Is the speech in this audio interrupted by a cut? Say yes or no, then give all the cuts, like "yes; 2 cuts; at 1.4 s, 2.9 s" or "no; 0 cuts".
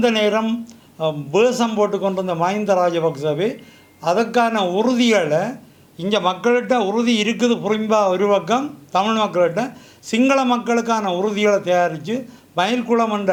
no; 0 cuts